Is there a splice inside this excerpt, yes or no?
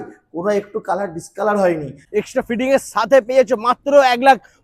yes